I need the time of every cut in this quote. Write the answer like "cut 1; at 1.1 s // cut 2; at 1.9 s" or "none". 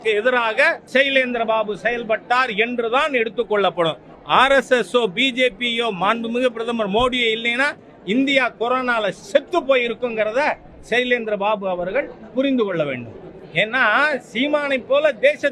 cut 1; at 0.8 s // cut 2; at 4.1 s // cut 3; at 13.4 s